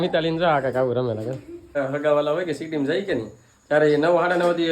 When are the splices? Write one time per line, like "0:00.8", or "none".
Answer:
0:01.8